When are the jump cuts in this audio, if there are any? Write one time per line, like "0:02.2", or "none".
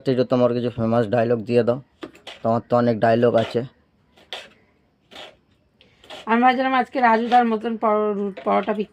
none